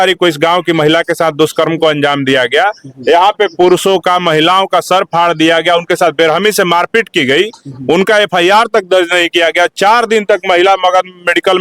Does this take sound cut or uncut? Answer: uncut